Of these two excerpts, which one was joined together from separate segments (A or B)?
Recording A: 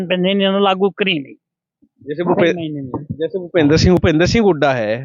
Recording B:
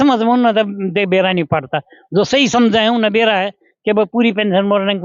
A